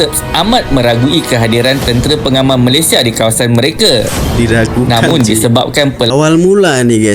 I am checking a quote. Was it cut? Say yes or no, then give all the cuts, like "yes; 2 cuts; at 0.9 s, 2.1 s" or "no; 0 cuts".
yes; 1 cut; at 6.1 s